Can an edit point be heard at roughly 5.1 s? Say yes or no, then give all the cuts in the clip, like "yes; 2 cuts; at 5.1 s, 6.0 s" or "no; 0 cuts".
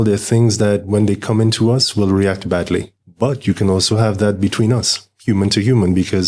no; 1 cut; at 3.0 s